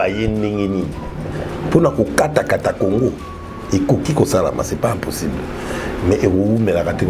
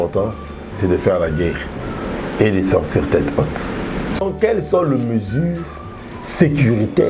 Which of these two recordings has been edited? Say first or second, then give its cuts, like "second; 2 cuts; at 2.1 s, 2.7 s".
second; 1 cut; at 4.2 s